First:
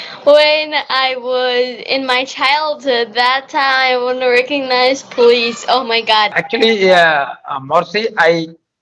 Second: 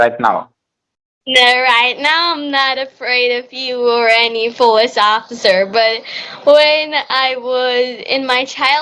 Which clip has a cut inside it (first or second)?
first